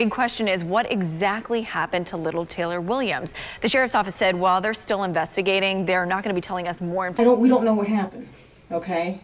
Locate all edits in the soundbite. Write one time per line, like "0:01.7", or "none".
0:07.2